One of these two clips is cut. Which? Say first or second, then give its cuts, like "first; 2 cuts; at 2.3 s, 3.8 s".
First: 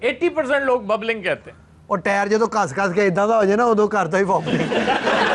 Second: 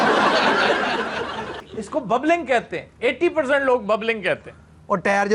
second; 1 cut; at 1.6 s